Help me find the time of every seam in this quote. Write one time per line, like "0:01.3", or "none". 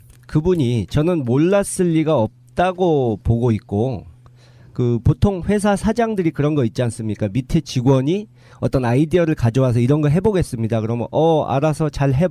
0:06.7